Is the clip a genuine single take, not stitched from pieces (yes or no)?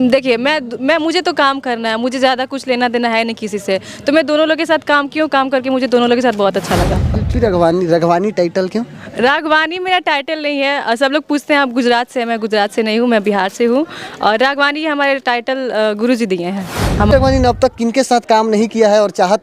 no